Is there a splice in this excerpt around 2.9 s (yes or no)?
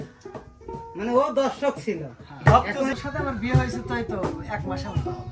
yes